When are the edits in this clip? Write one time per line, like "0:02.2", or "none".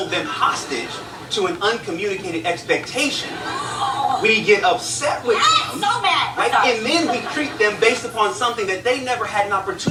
none